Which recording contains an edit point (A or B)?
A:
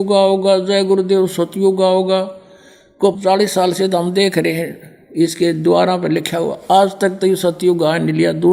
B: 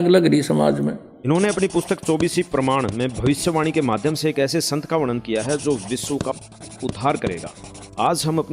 B